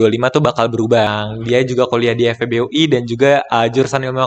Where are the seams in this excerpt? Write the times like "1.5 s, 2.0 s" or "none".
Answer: 1.1 s